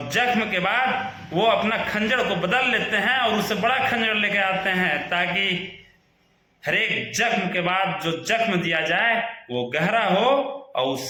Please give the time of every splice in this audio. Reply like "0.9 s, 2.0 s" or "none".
none